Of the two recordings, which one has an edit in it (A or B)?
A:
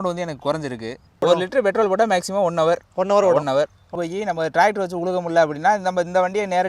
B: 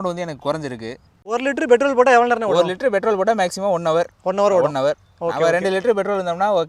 A